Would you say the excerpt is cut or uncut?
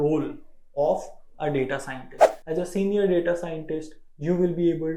cut